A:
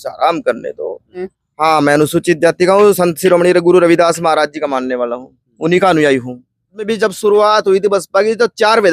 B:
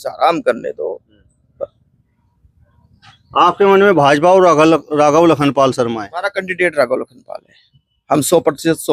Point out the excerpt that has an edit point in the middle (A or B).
A